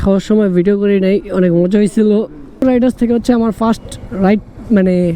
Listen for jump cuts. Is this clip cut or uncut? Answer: cut